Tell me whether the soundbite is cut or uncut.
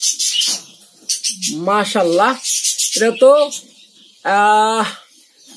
uncut